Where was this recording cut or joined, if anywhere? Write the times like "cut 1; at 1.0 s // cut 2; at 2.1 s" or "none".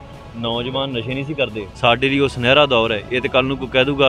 cut 1; at 1.6 s